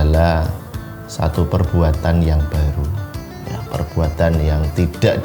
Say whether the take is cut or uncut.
uncut